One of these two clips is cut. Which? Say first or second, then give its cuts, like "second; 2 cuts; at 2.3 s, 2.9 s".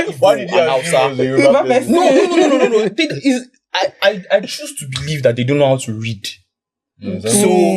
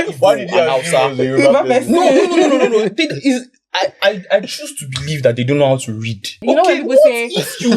second; 1 cut; at 6.4 s